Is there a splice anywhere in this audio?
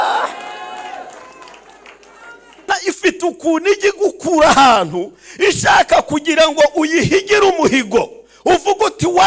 yes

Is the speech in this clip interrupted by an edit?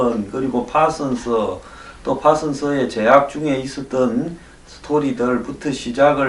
yes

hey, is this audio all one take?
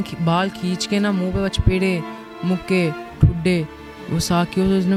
yes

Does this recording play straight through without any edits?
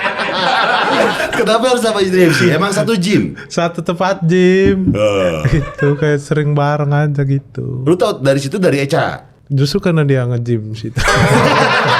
no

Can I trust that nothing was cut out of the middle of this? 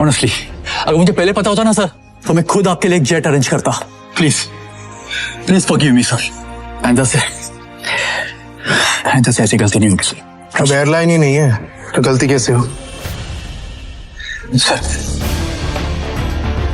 yes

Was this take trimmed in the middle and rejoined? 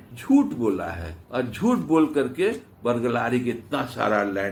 no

